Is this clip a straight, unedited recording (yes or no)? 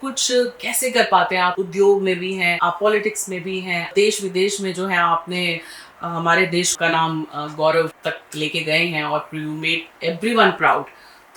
no